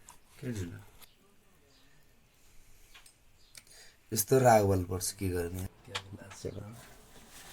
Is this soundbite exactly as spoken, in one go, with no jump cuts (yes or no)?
no